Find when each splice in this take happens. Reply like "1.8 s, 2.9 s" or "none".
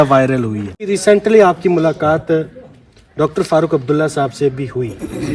0.9 s

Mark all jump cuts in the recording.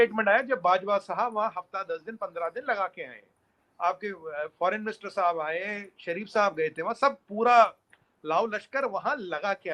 none

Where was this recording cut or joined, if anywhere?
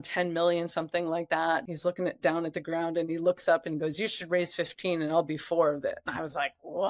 1.7 s

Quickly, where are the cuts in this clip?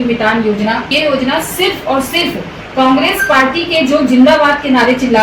0.9 s

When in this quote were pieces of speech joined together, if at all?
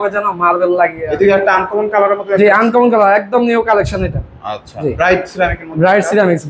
1.0 s

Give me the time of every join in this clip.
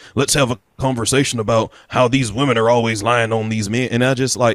none

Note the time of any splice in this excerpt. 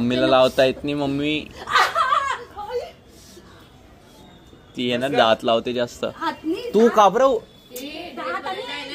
none

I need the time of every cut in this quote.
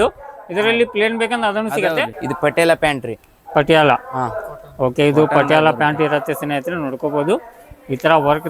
2.2 s

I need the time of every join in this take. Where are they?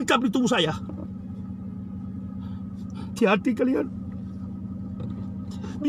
none

